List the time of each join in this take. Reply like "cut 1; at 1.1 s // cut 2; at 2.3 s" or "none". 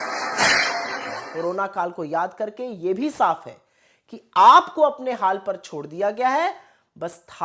cut 1; at 1.1 s